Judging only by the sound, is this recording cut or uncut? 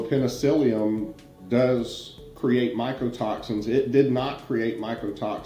uncut